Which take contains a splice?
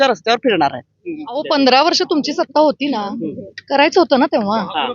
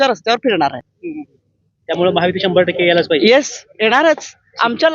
first; 1 cut; at 1.4 s

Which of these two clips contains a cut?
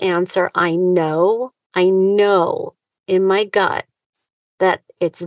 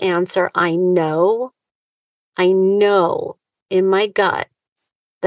first; 1 cut; at 1.6 s

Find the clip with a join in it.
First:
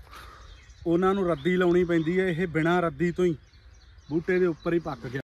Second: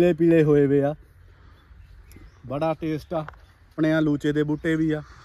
second; 1 cut; at 3.7 s

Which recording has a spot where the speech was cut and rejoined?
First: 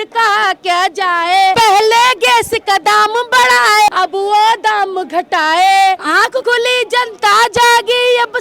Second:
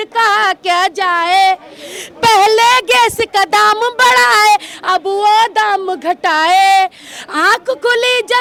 first; 3 cuts; at 1.5 s, 3.9 s, 6.4 s

